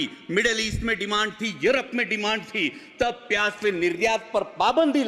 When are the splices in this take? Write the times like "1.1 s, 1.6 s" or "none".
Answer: none